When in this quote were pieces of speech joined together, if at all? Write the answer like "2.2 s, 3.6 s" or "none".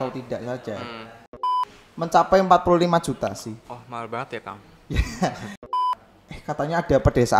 1.5 s, 5.7 s